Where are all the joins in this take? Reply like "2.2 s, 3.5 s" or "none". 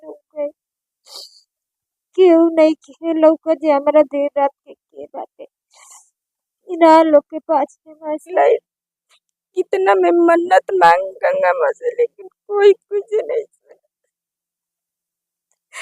8.2 s